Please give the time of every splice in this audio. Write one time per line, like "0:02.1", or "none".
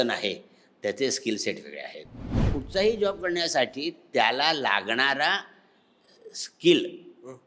0:02.5